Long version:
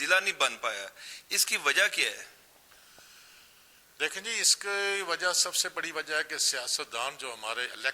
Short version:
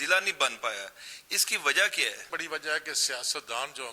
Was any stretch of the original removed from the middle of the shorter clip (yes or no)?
yes